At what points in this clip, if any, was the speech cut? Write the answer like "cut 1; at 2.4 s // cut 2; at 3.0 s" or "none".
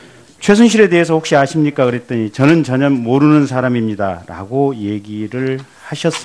cut 1; at 5.0 s